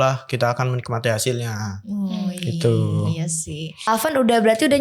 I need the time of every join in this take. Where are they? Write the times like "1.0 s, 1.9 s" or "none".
3.9 s